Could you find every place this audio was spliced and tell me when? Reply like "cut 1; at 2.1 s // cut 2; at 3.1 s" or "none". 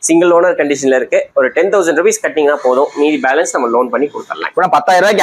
none